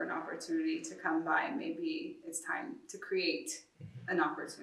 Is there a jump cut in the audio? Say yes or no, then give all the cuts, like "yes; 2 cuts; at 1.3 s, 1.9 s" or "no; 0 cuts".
no; 0 cuts